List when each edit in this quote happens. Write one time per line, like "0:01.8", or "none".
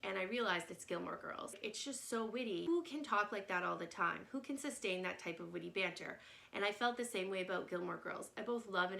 0:01.6
0:02.6